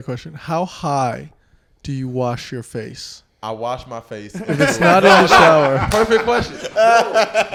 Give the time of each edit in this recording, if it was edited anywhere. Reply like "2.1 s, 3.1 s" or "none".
none